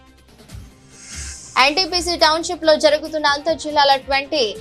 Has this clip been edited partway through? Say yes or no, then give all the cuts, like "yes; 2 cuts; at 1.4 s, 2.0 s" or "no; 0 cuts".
no; 0 cuts